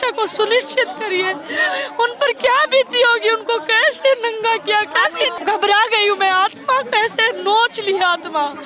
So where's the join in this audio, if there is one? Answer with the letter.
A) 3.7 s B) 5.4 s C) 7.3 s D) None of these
B